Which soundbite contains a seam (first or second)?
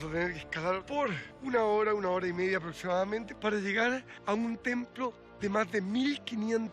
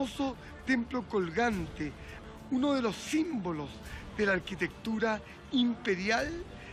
first